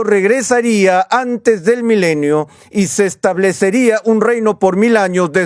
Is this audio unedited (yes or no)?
yes